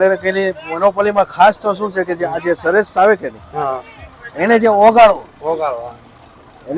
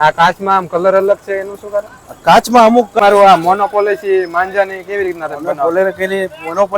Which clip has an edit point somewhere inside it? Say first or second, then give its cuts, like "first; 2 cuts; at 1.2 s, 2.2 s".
second; 1 cut; at 3.0 s